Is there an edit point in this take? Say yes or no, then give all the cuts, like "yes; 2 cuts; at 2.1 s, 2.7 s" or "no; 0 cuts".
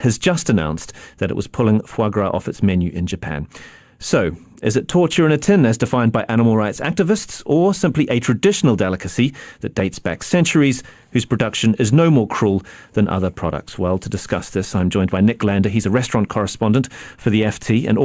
no; 0 cuts